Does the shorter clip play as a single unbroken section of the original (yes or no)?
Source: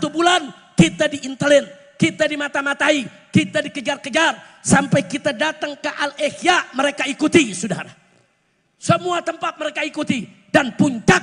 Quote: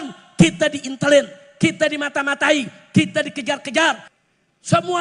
no